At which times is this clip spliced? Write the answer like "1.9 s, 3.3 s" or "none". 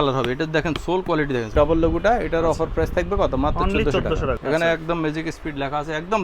1.5 s, 4.4 s